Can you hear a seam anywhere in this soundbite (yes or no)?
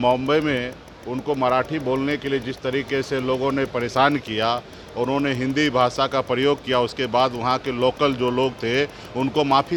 no